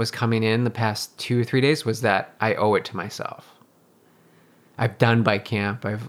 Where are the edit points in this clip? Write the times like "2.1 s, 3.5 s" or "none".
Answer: none